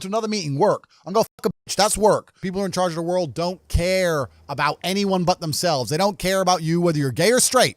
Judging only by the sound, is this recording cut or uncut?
cut